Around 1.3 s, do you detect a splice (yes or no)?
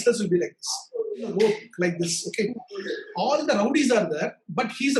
yes